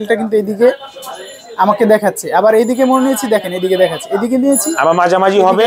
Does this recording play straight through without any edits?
yes; 0 cuts

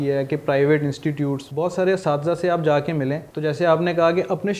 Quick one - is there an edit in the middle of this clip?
yes; 2 cuts; at 1.4 s, 3.3 s

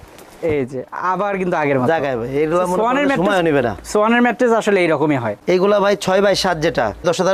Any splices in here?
no; 0 cuts

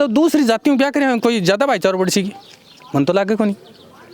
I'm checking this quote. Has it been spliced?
no; 0 cuts

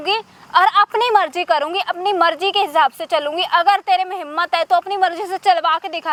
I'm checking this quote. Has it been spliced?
no; 0 cuts

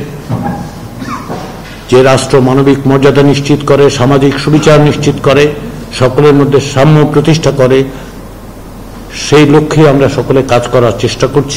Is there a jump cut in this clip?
no; 0 cuts

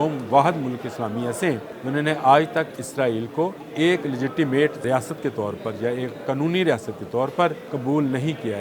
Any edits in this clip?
yes; 4 cuts; at 1.7 s, 3.6 s, 4.8 s, 7.7 s

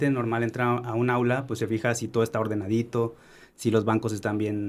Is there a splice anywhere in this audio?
no; 0 cuts

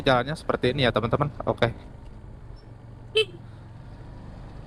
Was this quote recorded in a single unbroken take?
yes; 0 cuts

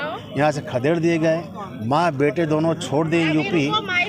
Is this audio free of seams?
yes; 0 cuts

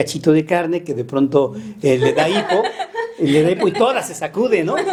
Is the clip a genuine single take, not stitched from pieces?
yes; 0 cuts

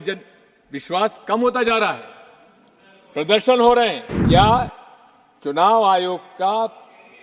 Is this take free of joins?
no; 1 cut; at 4.1 s

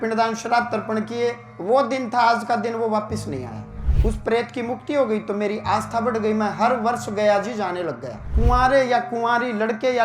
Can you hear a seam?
yes; 2 cuts; at 3.8 s, 8.3 s

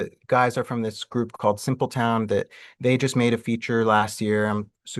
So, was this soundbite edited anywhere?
no; 0 cuts

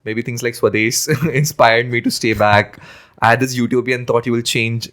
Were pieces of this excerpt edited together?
no; 0 cuts

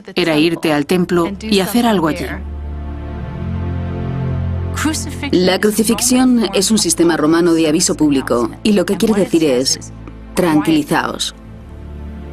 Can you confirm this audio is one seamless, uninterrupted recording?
no; 1 cut; at 6.9 s

